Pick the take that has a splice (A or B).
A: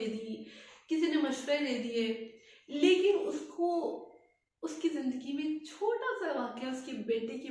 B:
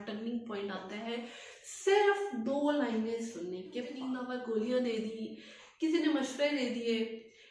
B